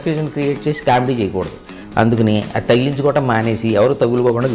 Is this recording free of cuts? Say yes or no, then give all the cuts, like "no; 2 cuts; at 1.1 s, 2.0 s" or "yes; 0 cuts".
yes; 0 cuts